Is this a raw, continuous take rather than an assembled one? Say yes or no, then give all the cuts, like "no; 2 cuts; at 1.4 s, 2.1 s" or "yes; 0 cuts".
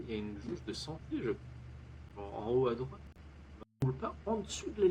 no; 1 cut; at 3.8 s